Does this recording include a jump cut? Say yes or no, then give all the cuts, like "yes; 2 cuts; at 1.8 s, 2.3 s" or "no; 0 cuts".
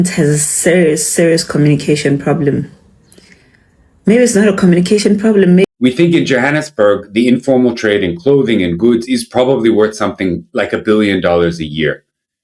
yes; 1 cut; at 5.6 s